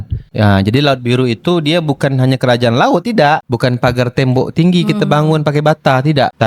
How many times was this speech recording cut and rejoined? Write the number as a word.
one